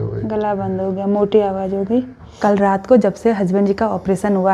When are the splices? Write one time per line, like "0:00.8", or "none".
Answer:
0:02.2